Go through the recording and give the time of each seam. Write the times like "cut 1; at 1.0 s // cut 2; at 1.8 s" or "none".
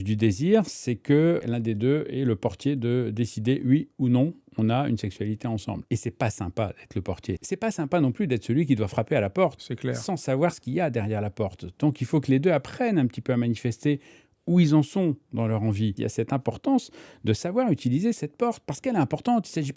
cut 1; at 1.4 s // cut 2; at 5.8 s // cut 3; at 7.4 s // cut 4; at 16.0 s